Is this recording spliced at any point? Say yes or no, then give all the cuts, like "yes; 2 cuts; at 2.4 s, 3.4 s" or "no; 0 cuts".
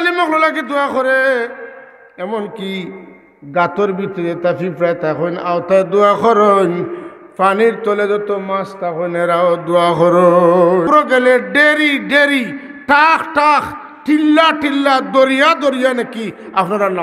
yes; 1 cut; at 10.9 s